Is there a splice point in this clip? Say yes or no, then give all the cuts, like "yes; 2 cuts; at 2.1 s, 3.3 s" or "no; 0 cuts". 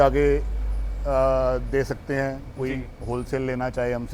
no; 0 cuts